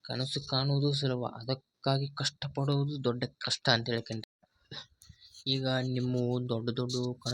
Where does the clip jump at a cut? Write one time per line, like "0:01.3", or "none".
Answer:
0:04.2